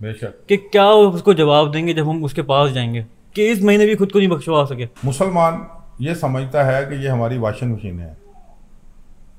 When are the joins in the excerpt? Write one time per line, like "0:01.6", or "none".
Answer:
0:04.9